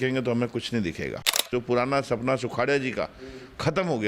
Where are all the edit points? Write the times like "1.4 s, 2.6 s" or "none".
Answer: 1.5 s